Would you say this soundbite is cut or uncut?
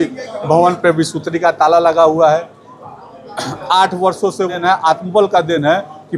cut